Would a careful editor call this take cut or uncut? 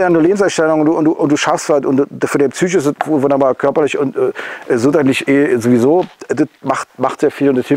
uncut